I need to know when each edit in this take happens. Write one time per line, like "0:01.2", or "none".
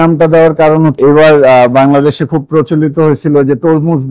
0:01.0